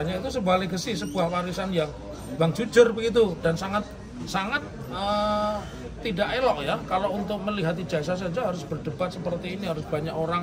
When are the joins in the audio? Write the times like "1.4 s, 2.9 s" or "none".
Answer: none